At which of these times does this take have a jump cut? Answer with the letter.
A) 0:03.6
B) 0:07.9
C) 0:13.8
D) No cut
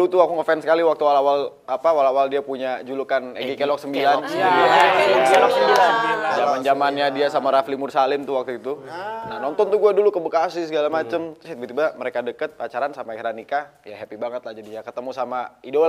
D